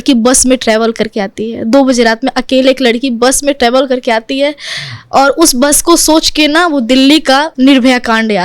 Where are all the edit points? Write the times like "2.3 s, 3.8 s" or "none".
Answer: 7.5 s